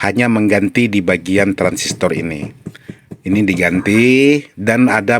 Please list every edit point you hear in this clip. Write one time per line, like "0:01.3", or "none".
none